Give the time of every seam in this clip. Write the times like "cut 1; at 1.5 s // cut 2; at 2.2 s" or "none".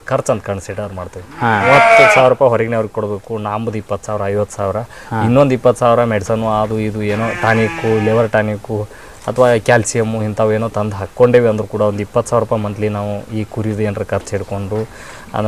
cut 1; at 1.6 s